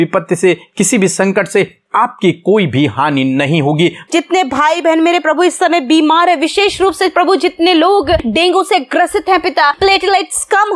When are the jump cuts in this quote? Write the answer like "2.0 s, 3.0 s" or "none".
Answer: 4.1 s, 8.2 s, 9.8 s